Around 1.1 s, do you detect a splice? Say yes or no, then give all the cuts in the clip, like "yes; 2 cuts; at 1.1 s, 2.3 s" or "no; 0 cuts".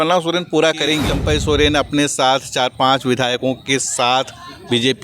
yes; 1 cut; at 1.1 s